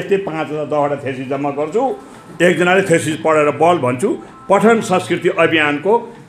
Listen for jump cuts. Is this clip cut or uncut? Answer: uncut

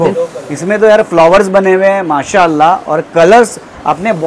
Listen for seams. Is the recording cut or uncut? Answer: uncut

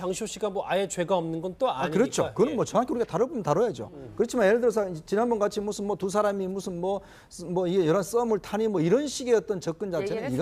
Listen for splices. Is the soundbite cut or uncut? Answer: uncut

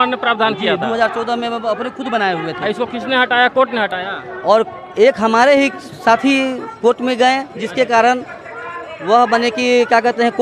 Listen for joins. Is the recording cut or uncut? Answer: uncut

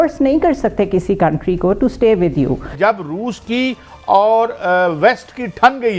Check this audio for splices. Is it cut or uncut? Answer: cut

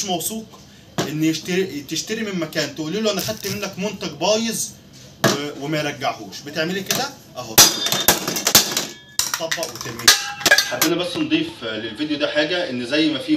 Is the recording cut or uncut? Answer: cut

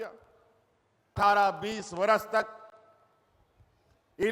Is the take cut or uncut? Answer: cut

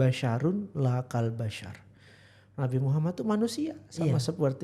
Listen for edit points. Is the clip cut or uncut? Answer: uncut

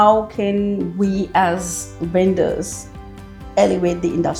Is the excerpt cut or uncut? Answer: uncut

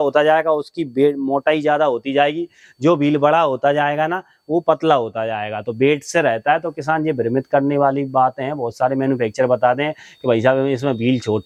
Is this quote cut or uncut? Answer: uncut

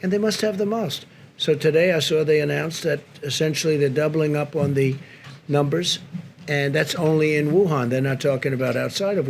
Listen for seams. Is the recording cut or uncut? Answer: uncut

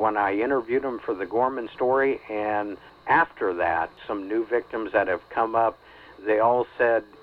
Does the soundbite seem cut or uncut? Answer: cut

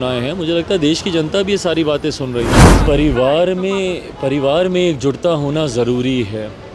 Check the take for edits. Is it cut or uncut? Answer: cut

